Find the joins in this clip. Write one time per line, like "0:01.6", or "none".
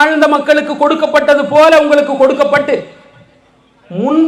none